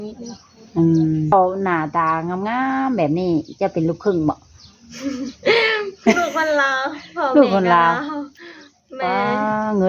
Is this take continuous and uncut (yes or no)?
no